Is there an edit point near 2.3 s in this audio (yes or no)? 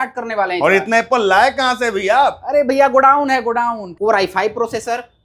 no